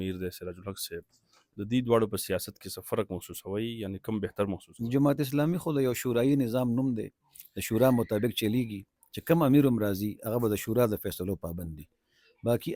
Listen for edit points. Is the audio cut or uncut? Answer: uncut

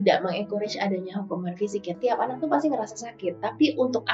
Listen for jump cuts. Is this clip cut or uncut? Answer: cut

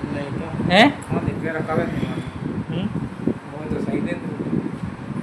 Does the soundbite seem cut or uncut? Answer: cut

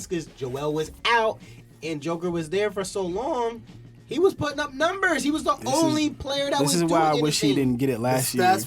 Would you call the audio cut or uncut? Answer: uncut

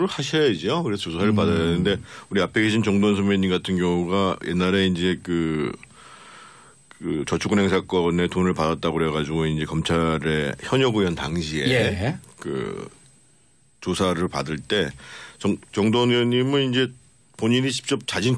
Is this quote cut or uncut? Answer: uncut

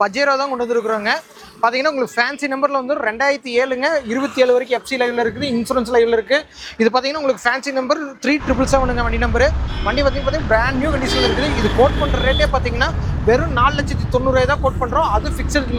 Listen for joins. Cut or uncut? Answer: uncut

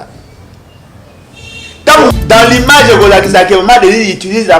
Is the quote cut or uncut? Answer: cut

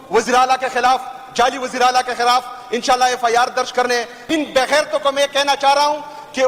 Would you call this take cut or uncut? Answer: cut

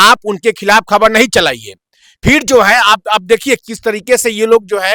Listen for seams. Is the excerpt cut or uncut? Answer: uncut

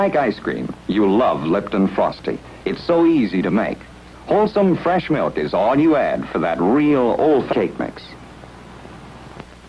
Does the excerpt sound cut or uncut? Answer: uncut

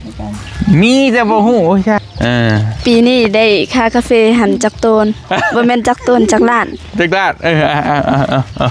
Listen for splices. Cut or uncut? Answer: cut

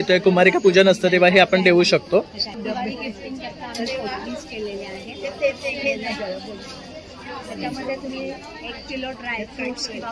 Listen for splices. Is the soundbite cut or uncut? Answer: cut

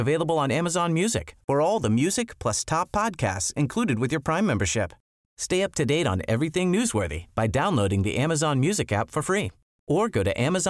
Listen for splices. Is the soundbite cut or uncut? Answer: uncut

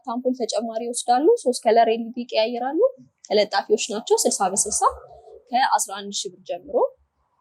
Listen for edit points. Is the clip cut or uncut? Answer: uncut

